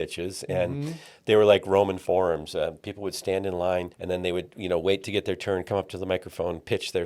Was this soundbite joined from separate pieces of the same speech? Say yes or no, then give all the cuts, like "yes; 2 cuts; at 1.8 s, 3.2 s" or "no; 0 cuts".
yes; 1 cut; at 3.9 s